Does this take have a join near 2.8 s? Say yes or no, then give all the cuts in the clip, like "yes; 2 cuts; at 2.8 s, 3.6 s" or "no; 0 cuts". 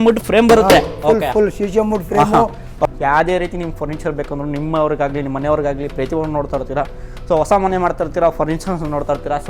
yes; 1 cut; at 2.8 s